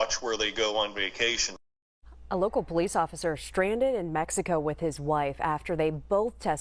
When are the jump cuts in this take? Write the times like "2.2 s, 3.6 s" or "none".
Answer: none